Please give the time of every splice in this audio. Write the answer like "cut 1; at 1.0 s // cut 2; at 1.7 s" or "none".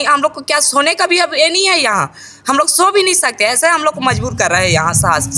none